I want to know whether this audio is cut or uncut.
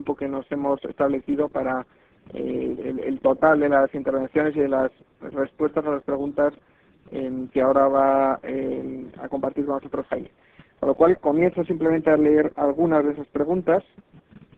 cut